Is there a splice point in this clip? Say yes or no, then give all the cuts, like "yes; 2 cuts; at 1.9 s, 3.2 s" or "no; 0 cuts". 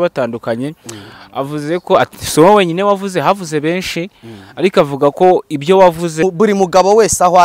yes; 1 cut; at 6.2 s